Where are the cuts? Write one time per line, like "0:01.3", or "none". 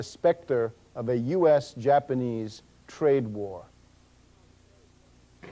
0:02.1

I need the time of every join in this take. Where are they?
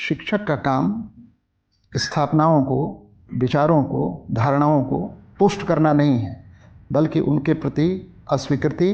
none

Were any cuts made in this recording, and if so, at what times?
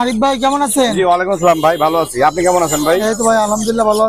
none

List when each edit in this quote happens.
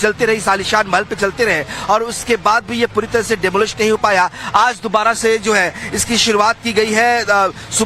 0:03.5

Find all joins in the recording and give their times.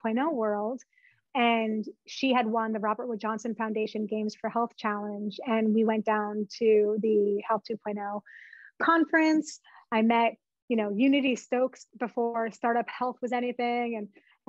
0:01.2
0:11.8

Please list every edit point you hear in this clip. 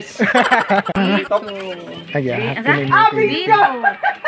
0:00.9

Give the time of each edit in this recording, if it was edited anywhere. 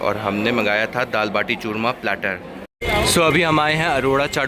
0:02.8

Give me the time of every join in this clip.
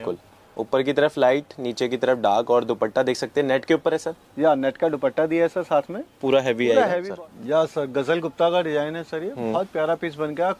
0:07.1

